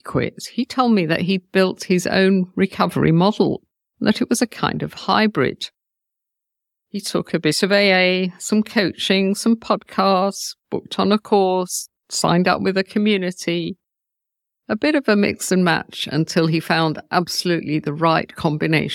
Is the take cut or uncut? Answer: uncut